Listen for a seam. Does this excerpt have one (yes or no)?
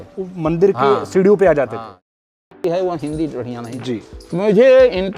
yes